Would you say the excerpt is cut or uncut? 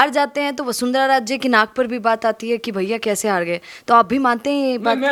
uncut